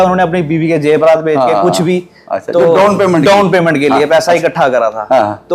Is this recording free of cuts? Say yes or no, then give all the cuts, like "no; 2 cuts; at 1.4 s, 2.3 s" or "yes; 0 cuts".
yes; 0 cuts